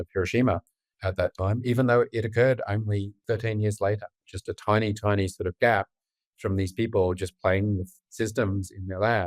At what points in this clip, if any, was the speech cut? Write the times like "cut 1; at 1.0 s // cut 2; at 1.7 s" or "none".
cut 1; at 0.9 s // cut 2; at 3.1 s // cut 3; at 4.3 s